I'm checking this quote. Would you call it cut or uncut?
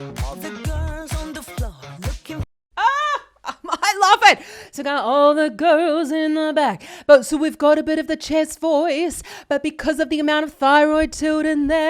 uncut